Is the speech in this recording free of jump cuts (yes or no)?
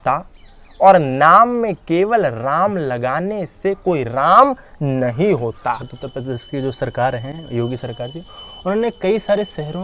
no